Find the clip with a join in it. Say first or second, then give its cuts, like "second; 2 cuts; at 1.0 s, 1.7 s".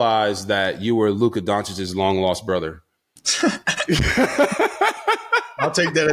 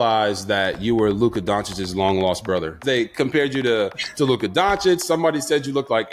second; 1 cut; at 2.8 s